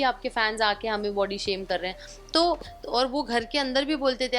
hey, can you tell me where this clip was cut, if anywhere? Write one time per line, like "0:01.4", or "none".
0:02.7